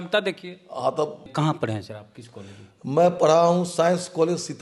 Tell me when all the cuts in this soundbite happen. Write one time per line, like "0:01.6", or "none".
0:01.3